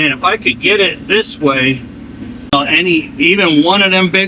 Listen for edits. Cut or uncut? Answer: cut